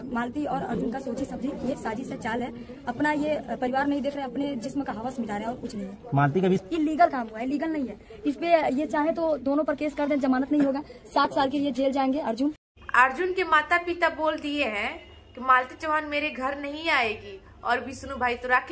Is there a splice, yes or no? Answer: yes